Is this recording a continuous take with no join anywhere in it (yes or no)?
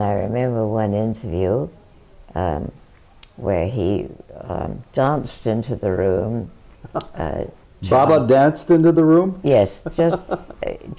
yes